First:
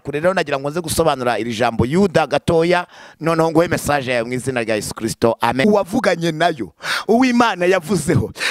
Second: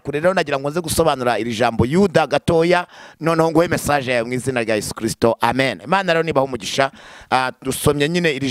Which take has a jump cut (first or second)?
first